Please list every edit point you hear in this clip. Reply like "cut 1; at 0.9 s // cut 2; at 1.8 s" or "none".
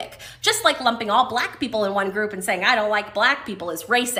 none